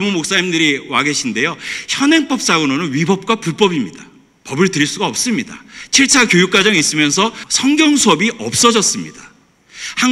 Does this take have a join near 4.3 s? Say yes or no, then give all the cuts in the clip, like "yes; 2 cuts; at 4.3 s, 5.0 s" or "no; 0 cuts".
no; 1 cut; at 7.4 s